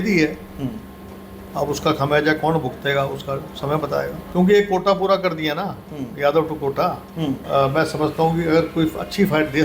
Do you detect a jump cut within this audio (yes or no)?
yes